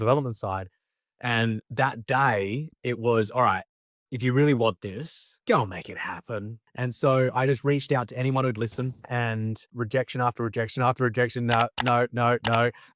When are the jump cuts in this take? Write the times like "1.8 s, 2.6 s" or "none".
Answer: 6.9 s